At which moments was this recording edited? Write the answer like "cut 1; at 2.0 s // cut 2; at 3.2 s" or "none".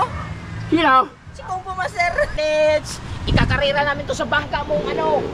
cut 1; at 2.4 s